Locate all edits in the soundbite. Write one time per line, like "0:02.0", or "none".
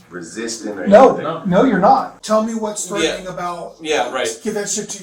0:02.1